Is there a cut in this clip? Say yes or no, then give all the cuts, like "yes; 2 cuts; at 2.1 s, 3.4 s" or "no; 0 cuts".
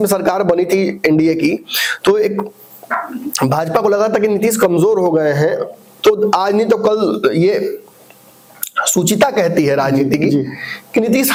no; 0 cuts